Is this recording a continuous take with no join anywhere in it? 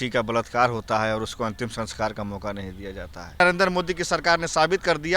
no; 1 cut; at 3.4 s

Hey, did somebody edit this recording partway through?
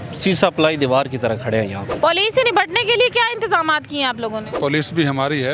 yes; 1 cut; at 1.9 s

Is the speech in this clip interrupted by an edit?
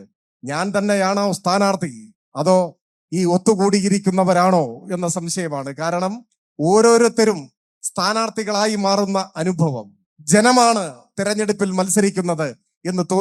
no; 0 cuts

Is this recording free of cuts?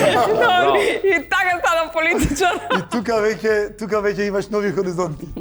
yes; 0 cuts

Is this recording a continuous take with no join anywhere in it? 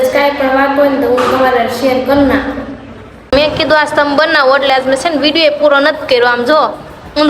no; 1 cut; at 3.3 s

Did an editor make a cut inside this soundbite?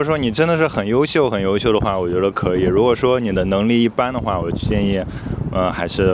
no; 0 cuts

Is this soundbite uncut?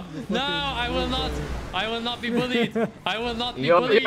yes; 0 cuts

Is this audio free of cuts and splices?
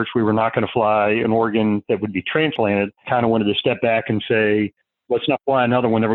yes; 0 cuts

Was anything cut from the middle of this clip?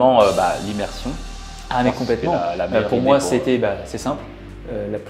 no; 0 cuts

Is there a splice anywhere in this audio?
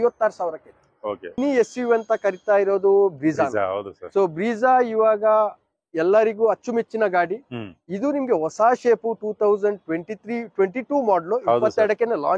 yes; 1 cut; at 1.3 s

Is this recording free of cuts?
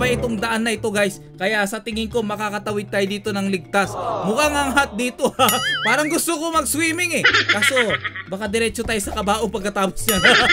yes; 0 cuts

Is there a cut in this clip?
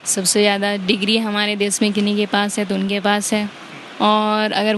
no; 0 cuts

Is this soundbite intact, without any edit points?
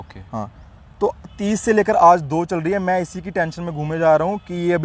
yes; 0 cuts

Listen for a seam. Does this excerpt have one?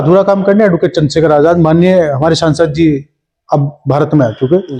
no; 0 cuts

